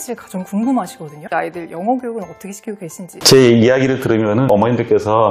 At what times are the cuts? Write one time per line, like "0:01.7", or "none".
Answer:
0:03.1